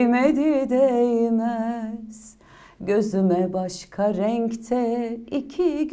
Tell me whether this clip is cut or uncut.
uncut